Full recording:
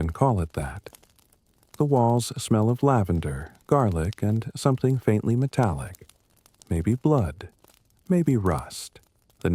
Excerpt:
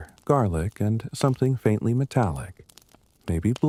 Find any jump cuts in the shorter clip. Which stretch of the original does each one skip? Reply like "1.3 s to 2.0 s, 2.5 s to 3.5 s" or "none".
none